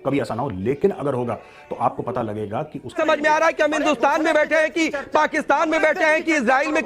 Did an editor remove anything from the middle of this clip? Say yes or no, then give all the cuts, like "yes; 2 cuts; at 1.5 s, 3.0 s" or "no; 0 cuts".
yes; 1 cut; at 2.9 s